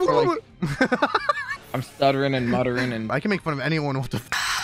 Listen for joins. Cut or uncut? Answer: cut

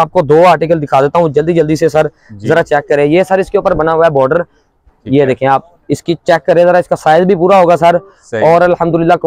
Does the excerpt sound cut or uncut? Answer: uncut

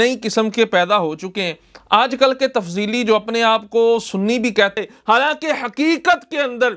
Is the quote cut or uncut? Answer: cut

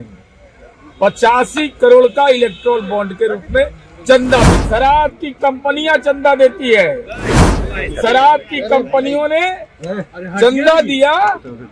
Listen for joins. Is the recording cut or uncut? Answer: cut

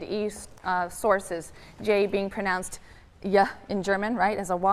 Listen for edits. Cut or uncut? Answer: uncut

